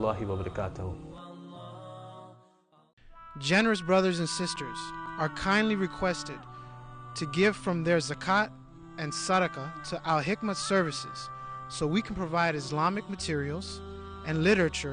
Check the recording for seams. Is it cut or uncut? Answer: cut